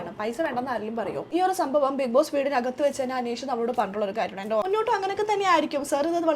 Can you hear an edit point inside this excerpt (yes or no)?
yes